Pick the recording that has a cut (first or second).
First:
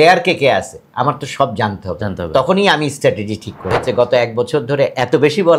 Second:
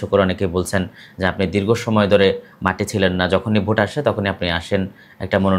first